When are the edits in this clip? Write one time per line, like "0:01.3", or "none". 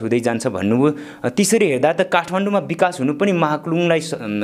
none